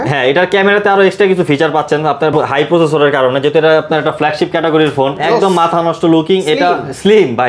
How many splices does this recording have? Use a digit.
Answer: 1